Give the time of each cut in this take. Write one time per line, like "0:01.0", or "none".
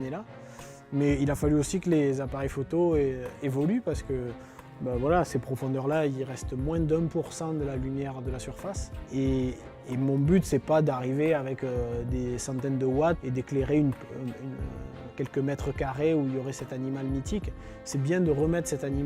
none

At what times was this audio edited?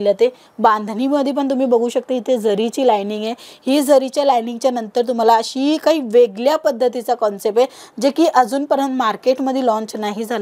none

